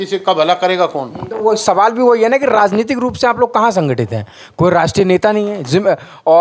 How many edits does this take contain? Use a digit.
0